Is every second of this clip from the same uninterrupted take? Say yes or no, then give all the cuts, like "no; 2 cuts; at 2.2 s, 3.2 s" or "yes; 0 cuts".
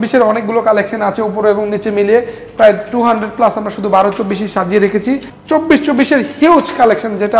no; 1 cut; at 5.3 s